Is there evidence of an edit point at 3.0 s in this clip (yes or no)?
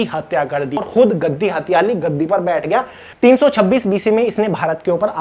yes